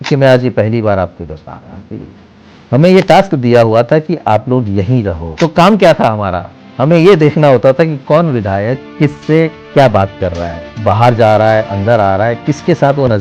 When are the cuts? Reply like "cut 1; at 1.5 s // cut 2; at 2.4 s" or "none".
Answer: cut 1; at 5.2 s